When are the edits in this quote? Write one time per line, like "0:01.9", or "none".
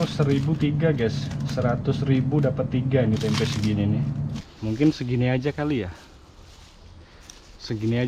0:04.4